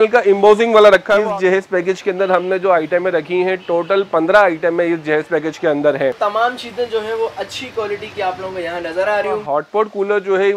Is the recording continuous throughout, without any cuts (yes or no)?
no